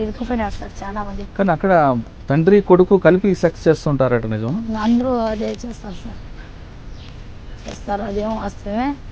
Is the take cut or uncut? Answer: cut